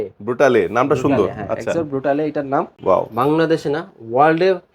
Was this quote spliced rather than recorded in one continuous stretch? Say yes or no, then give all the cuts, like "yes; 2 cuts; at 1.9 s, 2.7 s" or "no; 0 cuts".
yes; 1 cut; at 2.7 s